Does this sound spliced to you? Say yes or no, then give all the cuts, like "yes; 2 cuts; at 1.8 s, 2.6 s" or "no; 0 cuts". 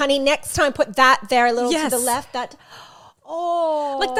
no; 0 cuts